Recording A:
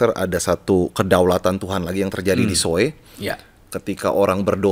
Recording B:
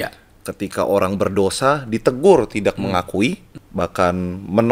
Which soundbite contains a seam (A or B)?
B